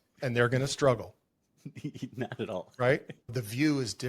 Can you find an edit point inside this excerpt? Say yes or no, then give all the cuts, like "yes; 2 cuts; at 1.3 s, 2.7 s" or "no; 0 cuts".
yes; 1 cut; at 3.1 s